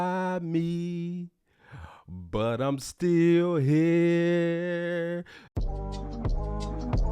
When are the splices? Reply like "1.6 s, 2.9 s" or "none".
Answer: 5.5 s